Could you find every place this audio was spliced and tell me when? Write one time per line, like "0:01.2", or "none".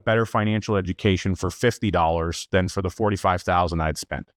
none